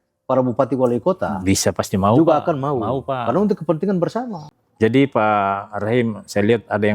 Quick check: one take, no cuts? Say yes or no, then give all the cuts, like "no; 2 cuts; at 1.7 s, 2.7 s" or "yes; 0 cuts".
no; 1 cut; at 4.4 s